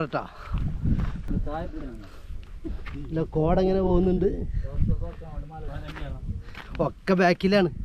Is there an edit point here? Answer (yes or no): yes